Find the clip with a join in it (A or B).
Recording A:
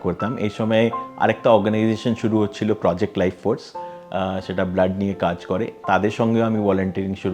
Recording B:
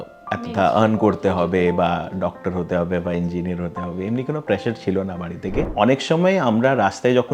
B